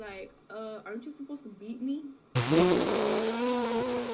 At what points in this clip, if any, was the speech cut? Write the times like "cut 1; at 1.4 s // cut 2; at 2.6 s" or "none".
cut 1; at 2.4 s